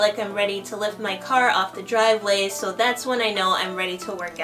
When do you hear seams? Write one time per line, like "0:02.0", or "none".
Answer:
none